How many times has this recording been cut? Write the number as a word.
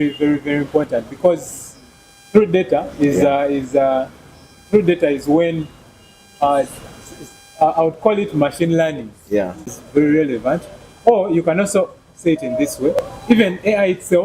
two